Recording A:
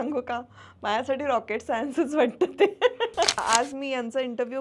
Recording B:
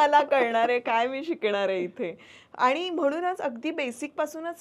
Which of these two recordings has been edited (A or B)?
A